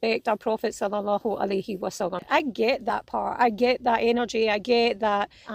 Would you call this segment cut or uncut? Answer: uncut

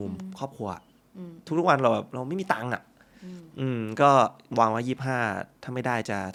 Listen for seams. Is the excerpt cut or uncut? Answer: uncut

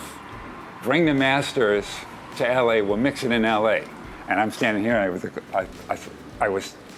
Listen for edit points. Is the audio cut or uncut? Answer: uncut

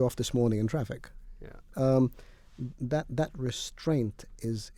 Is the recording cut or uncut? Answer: uncut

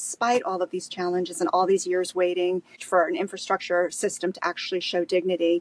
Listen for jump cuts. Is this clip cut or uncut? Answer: cut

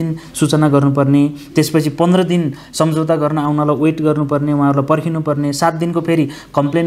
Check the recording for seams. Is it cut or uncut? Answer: uncut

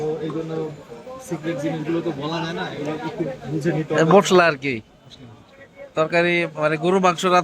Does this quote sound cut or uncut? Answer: uncut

